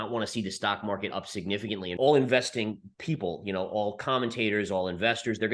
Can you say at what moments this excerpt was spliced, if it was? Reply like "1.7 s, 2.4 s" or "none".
1.9 s